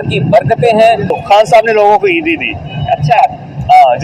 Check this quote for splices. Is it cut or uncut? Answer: cut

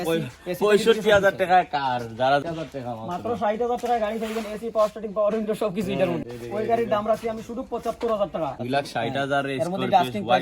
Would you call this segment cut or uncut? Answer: cut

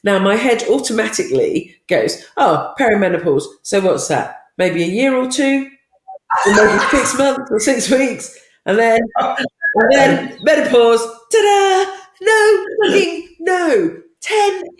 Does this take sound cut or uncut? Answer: uncut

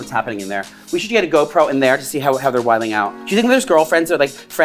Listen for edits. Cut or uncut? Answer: uncut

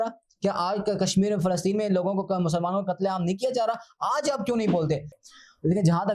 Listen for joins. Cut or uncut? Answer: cut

